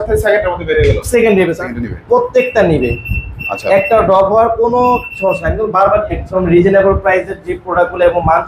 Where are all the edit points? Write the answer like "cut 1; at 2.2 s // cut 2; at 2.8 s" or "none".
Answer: cut 1; at 1.6 s // cut 2; at 6.2 s